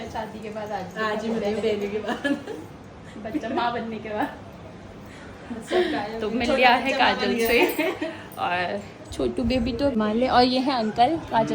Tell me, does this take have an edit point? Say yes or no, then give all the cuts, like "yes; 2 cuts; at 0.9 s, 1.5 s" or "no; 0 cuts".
yes; 1 cut; at 10.0 s